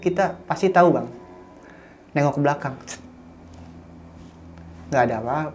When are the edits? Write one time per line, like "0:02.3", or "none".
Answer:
none